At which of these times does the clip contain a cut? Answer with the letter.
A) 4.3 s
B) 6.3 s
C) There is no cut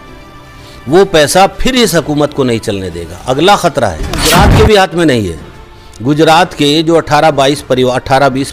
A